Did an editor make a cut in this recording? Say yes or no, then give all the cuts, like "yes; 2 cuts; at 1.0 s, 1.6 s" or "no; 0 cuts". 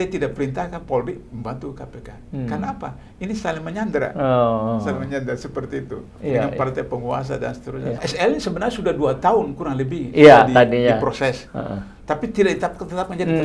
yes; 1 cut; at 8.0 s